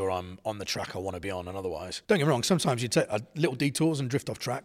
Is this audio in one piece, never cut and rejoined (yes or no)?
no